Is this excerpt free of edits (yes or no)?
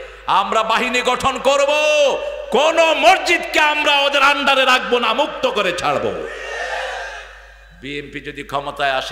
yes